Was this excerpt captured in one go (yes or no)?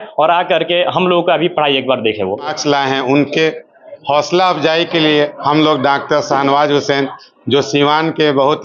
no